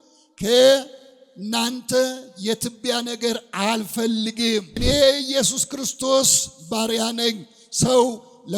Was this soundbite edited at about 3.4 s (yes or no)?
no